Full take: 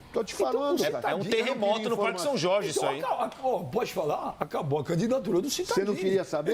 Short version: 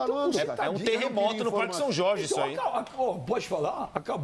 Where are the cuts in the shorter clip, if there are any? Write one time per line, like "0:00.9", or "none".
none